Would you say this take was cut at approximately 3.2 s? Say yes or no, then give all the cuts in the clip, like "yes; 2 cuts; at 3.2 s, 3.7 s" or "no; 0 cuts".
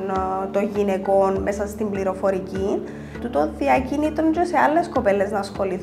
yes; 1 cut; at 3.2 s